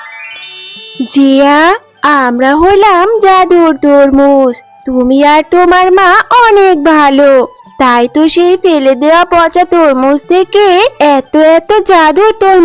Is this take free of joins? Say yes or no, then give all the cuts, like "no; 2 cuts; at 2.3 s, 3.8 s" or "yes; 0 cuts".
no; 1 cut; at 1.0 s